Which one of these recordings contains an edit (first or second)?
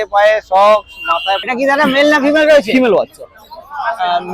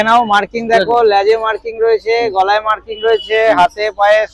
first